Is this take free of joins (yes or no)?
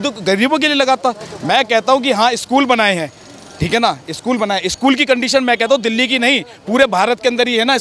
yes